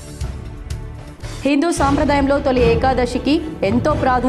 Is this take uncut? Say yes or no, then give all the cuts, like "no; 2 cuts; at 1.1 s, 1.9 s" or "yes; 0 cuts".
no; 1 cut; at 1.0 s